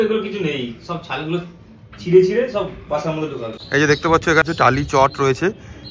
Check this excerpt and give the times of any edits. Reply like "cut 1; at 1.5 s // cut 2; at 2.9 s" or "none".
cut 1; at 3.6 s // cut 2; at 4.4 s